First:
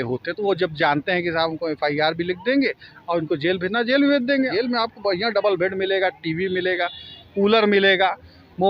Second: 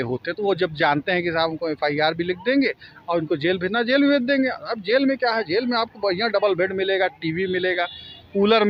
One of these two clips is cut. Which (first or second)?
first